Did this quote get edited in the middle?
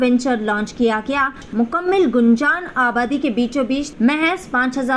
yes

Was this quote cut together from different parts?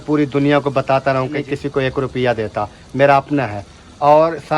yes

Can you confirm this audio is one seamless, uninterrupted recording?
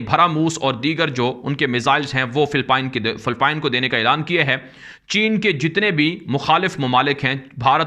yes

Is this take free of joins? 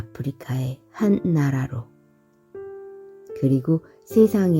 no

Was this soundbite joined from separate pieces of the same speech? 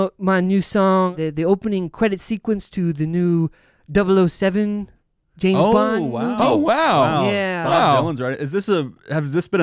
yes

